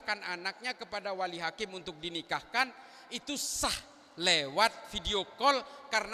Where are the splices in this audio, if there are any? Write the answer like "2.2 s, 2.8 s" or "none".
none